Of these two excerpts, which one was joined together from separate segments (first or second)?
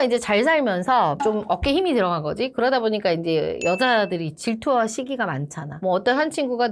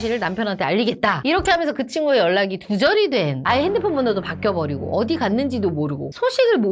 first